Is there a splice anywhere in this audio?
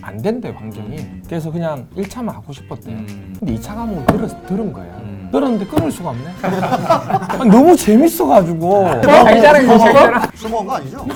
no; 0 cuts

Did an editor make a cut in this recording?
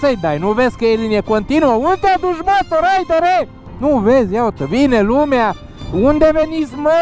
yes; 1 cut; at 3.6 s

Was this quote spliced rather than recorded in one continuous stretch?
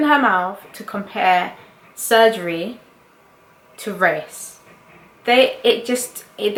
no; 0 cuts

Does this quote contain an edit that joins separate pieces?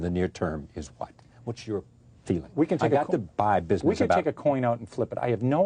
no; 0 cuts

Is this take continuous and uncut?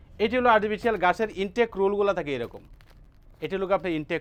yes; 0 cuts

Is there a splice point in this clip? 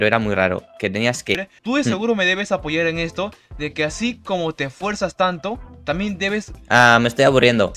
yes; 2 cuts; at 1.4 s, 6.5 s

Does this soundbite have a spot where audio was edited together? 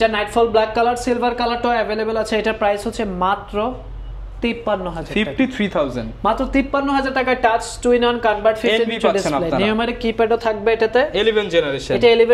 no; 0 cuts

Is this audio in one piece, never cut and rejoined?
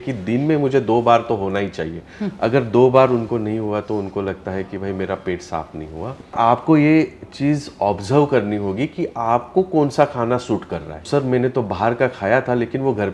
no; 2 cuts; at 6.3 s, 11.1 s

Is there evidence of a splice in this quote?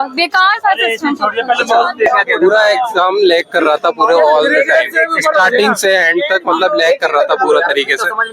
yes; 1 cut; at 2.1 s

